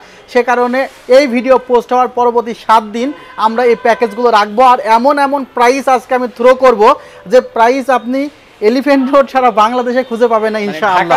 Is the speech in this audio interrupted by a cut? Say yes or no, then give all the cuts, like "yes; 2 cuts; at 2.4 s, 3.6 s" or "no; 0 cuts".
no; 0 cuts